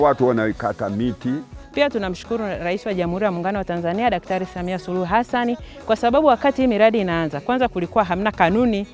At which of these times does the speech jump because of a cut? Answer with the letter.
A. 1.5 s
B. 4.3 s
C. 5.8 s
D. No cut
A